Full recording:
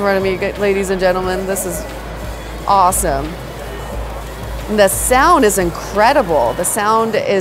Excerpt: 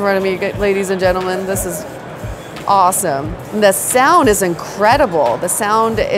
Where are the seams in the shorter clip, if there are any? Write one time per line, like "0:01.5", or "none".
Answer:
0:03.4